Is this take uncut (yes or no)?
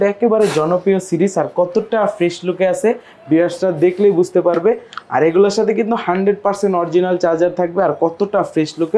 yes